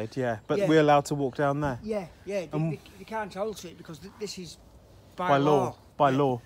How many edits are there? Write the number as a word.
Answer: zero